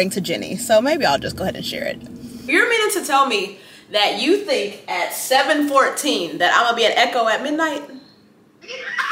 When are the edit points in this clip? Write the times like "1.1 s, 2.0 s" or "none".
2.4 s